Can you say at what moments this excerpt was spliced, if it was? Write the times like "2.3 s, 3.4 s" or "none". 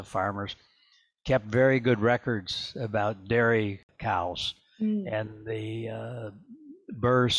3.9 s